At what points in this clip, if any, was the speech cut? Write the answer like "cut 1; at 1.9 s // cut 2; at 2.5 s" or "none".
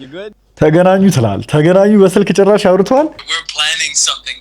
cut 1; at 3.2 s